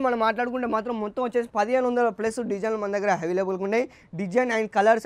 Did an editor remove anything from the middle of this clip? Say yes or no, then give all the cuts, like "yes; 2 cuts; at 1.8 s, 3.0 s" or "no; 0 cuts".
no; 0 cuts